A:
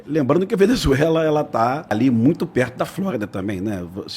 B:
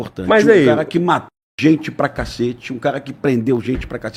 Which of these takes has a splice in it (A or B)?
A